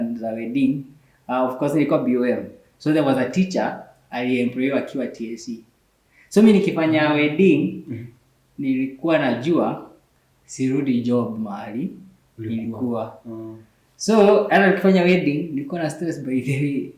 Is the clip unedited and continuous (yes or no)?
yes